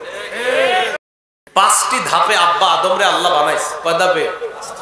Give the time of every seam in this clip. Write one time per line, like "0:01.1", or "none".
0:00.9